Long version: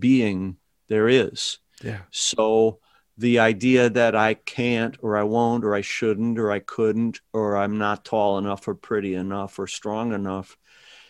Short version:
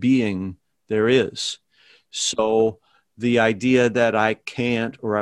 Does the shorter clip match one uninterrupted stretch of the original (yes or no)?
yes